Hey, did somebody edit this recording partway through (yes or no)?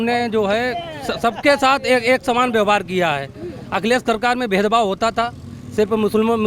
no